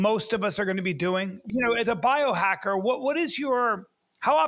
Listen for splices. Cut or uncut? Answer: cut